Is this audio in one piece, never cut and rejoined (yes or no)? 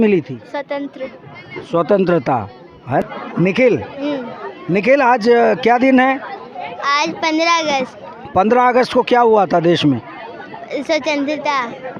no